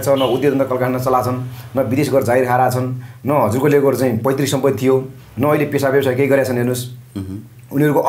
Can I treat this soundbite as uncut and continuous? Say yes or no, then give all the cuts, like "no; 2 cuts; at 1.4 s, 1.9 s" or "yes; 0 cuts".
yes; 0 cuts